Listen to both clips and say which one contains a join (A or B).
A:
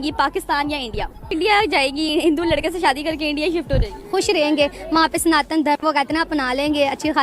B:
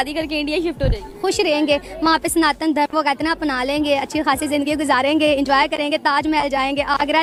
A